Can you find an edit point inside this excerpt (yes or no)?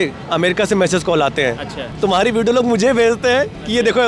yes